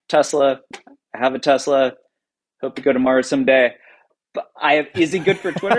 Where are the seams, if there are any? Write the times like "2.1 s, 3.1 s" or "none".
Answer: none